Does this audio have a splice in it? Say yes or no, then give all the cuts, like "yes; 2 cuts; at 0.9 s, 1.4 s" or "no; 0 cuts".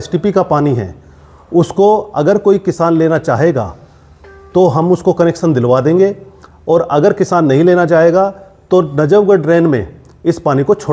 no; 0 cuts